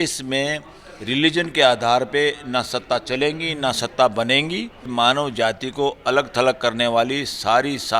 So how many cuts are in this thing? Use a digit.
1